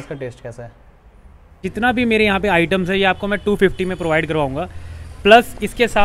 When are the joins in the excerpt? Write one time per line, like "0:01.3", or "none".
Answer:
0:01.6